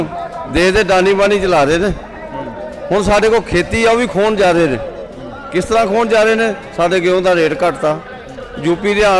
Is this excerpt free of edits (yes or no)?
yes